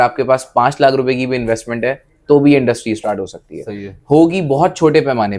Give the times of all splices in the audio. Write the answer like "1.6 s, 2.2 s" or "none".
none